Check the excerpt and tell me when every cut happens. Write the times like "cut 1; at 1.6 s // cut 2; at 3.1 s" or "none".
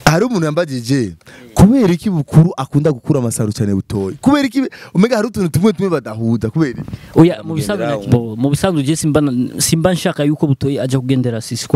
cut 1; at 7.8 s